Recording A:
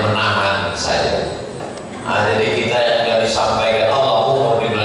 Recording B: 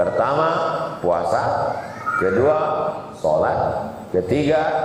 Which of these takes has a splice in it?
A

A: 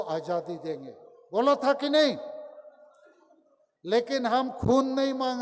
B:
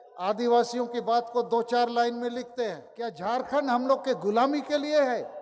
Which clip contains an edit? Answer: B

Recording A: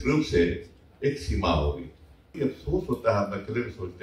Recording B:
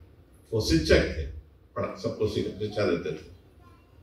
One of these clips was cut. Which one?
A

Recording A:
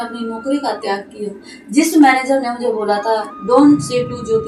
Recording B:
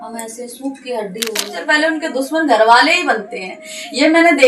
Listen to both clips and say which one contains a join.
B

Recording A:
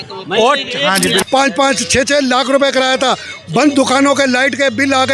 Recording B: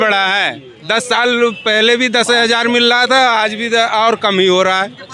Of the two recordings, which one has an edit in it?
A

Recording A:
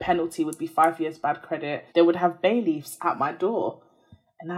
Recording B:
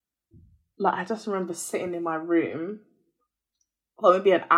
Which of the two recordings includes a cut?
A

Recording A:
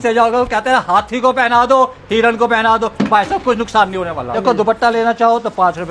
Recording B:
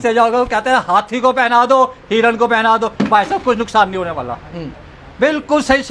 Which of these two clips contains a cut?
A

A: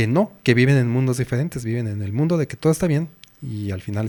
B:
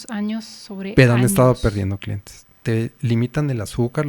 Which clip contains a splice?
B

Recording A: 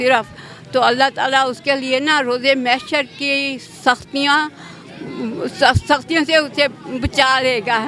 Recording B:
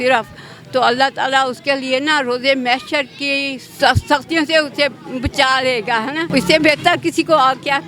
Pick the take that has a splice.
B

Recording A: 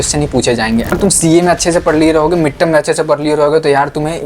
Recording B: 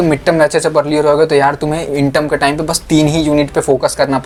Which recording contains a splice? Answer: A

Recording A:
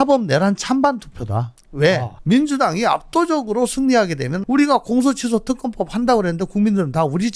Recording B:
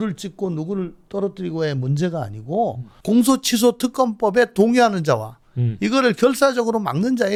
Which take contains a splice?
A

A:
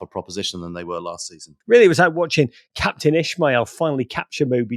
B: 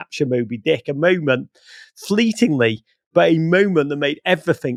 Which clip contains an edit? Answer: A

